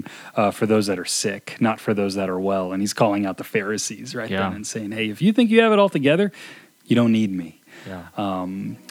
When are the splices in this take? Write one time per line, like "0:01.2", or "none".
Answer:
none